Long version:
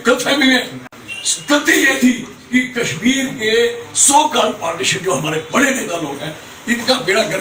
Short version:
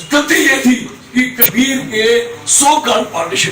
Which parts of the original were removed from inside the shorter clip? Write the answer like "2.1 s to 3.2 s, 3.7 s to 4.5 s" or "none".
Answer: 2.8 s to 2.9 s